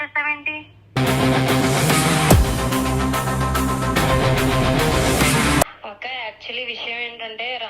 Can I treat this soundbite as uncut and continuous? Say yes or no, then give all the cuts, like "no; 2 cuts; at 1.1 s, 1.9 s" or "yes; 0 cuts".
no; 1 cut; at 5.6 s